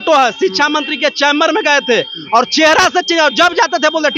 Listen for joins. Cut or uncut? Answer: uncut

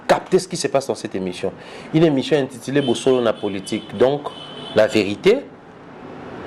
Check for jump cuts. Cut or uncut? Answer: uncut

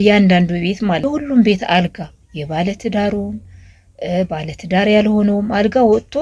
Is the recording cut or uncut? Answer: cut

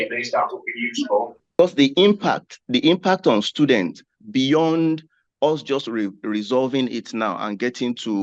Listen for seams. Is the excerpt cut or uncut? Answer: cut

